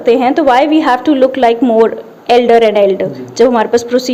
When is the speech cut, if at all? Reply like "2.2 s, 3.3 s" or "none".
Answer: none